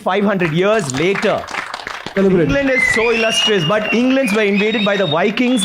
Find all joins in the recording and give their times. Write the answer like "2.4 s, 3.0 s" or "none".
2.2 s